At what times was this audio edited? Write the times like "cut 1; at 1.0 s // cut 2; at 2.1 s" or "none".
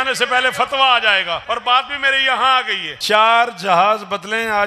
cut 1; at 1.4 s // cut 2; at 2.9 s